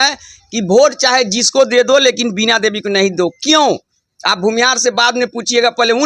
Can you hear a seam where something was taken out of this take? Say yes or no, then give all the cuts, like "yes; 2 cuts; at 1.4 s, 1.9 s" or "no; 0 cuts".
no; 0 cuts